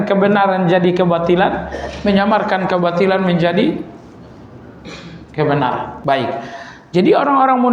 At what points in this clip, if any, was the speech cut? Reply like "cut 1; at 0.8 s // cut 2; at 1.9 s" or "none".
cut 1; at 5.9 s